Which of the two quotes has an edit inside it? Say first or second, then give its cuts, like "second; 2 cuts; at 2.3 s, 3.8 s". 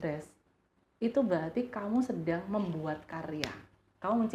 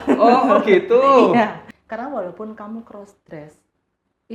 second; 1 cut; at 1.7 s